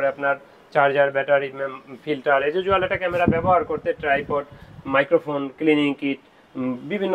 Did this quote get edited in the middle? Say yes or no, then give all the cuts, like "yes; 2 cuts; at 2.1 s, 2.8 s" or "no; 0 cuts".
no; 0 cuts